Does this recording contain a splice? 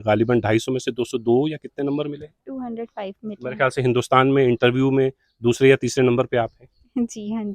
no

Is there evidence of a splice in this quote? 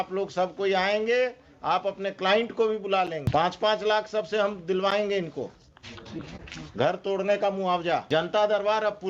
yes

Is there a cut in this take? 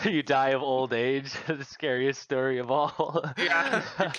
no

